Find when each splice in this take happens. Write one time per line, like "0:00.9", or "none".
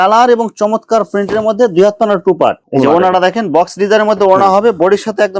none